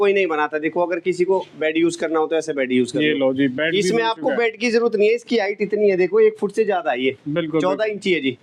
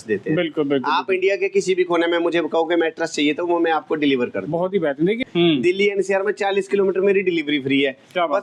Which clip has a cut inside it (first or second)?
second